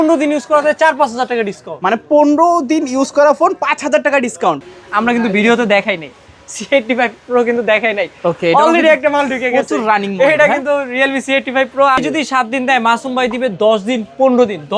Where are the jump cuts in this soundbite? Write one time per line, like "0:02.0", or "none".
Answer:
0:04.7
0:12.0